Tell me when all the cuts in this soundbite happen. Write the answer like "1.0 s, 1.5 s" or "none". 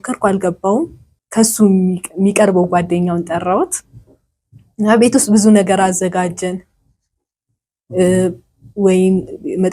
1.1 s